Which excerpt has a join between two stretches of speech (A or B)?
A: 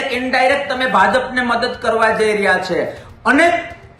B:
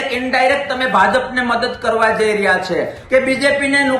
B